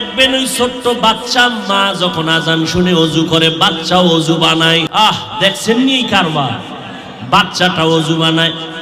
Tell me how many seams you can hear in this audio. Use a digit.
1